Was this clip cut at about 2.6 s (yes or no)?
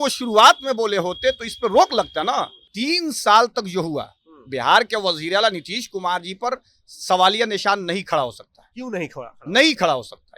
yes